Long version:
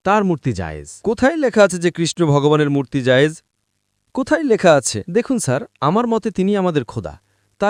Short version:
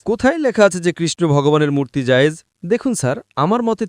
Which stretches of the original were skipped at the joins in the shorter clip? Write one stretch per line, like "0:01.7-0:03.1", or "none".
0:03.5-0:05.0